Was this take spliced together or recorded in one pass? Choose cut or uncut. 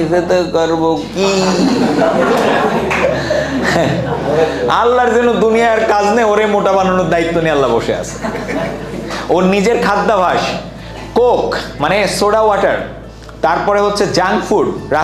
uncut